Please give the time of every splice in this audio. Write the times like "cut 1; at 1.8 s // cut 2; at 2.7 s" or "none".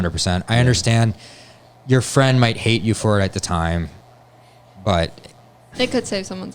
none